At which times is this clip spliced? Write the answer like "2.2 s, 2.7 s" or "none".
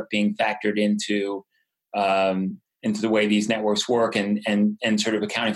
none